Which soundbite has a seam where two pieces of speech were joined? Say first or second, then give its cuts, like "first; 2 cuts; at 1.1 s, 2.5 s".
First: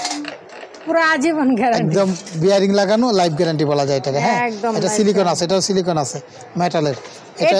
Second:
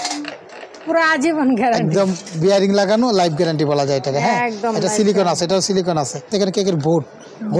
second; 1 cut; at 6.3 s